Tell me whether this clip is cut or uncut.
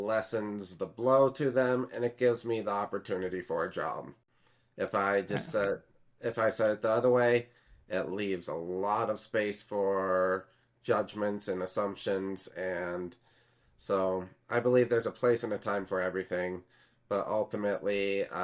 uncut